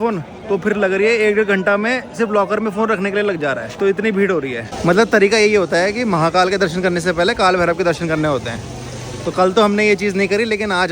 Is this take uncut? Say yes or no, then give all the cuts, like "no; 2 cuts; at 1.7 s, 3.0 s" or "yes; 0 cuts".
no; 2 cuts; at 3.7 s, 4.6 s